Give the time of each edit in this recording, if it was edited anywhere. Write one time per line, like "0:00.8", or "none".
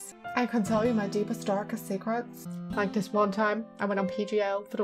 none